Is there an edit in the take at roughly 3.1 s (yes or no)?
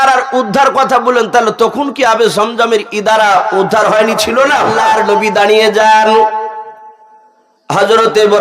no